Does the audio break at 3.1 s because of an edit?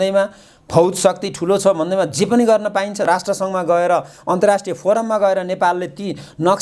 yes; 1 cut; at 3.1 s

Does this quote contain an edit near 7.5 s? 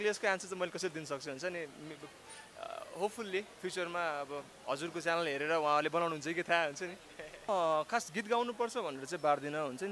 yes; 1 cut; at 7.5 s

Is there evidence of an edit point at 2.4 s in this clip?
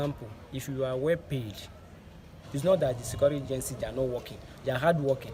yes; 1 cut; at 2.4 s

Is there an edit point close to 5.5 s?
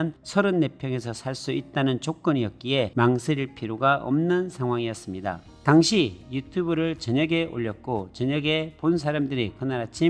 yes; 1 cut; at 5.5 s

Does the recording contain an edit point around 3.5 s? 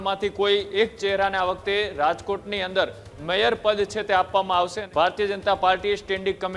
no; 1 cut; at 4.8 s

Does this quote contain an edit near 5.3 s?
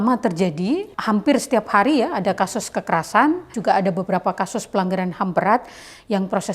no; 2 cuts; at 0.9 s, 3.5 s

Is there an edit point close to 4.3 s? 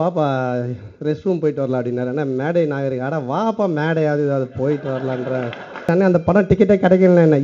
no; 1 cut; at 5.9 s

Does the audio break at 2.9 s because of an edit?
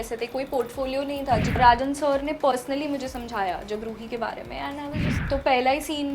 no; 2 cuts; at 1.6 s, 5.2 s

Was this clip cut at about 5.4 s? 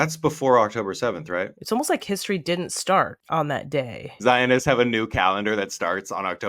no; 2 cuts; at 1.6 s, 4.0 s

